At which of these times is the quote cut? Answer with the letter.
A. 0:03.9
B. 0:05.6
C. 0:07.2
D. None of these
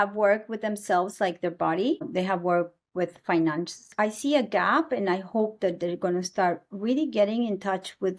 A